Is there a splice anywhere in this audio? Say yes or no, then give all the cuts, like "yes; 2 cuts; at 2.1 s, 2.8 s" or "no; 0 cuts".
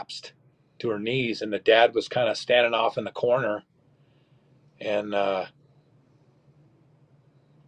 no; 0 cuts